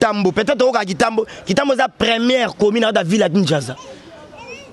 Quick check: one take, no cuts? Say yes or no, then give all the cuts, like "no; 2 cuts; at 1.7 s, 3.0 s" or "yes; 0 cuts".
yes; 0 cuts